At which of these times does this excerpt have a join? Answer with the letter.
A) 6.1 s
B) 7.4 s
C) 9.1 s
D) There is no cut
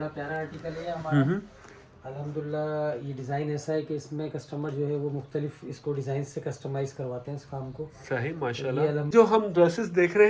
C